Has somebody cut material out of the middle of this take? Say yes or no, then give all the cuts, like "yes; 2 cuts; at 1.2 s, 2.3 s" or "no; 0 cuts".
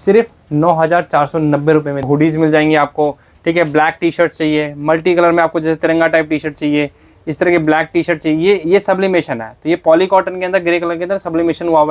yes; 1 cut; at 2.1 s